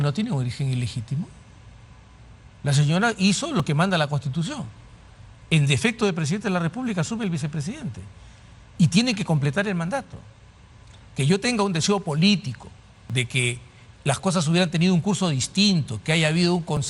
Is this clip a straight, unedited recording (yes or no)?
yes